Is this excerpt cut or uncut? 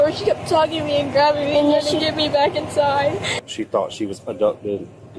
cut